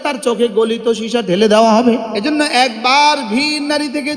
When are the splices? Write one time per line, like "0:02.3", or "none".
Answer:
0:02.1